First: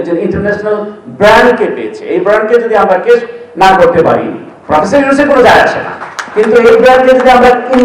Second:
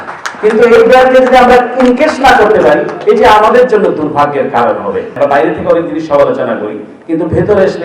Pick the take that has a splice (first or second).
second